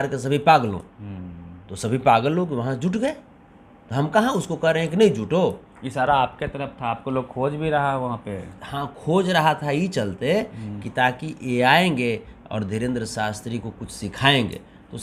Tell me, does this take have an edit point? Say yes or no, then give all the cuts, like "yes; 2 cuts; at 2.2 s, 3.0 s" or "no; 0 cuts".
no; 0 cuts